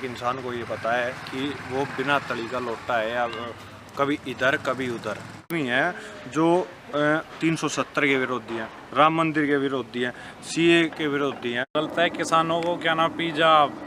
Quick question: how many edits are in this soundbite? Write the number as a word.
two